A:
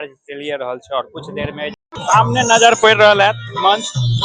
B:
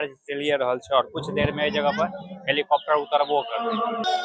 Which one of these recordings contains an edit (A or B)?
A